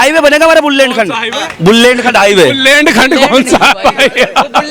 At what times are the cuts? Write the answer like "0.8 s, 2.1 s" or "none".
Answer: none